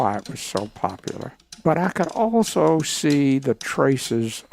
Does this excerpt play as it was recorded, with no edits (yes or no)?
no